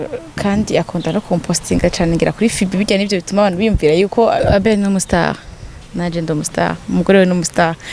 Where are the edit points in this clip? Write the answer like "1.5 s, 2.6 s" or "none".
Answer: 4.4 s